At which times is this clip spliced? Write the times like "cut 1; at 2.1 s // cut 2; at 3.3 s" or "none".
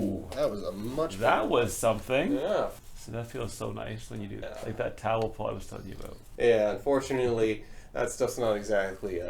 cut 1; at 2.8 s // cut 2; at 4.4 s // cut 3; at 6.3 s